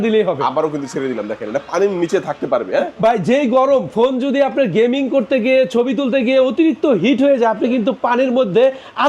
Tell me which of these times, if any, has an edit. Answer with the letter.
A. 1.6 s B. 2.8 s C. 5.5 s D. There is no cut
D